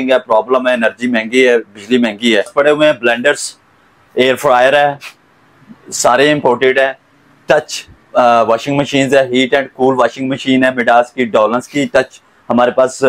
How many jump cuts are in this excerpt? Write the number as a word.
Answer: one